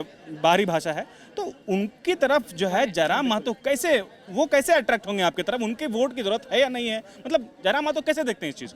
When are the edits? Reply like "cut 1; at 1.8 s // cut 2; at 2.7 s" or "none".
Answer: none

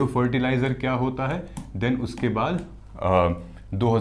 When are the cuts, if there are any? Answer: none

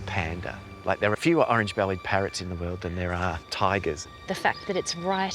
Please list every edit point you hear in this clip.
cut 1; at 1.2 s // cut 2; at 3.5 s // cut 3; at 4.2 s

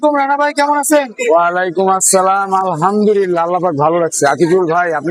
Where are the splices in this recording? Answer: none

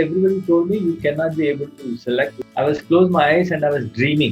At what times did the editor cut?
cut 1; at 2.4 s

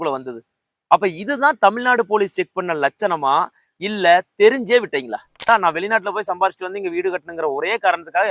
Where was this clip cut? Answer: cut 1; at 5.4 s

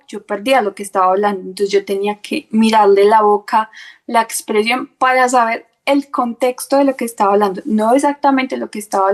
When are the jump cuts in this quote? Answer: none

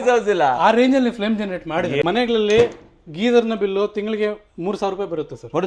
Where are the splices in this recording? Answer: cut 1; at 2.0 s

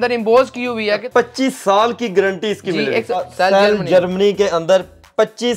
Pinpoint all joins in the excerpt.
cut 1; at 1.0 s // cut 2; at 3.3 s

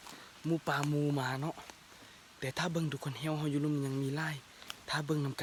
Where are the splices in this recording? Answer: none

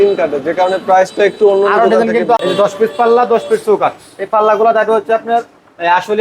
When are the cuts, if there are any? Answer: cut 1; at 2.4 s

